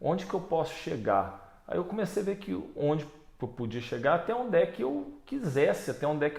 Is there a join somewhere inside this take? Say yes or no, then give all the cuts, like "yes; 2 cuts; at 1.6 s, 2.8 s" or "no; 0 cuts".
no; 0 cuts